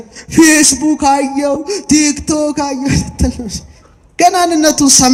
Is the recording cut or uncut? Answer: uncut